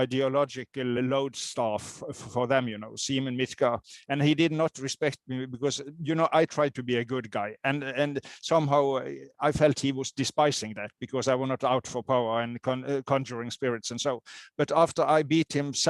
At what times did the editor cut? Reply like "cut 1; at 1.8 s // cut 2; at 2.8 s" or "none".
cut 1; at 1.0 s